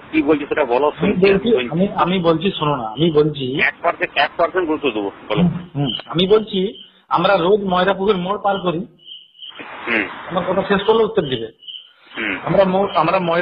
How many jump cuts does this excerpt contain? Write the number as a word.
one